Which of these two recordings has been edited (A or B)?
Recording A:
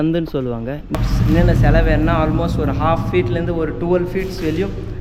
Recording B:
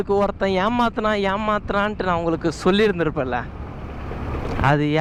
A